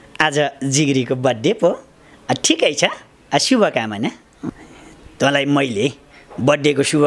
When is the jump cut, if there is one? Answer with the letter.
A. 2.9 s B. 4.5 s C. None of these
B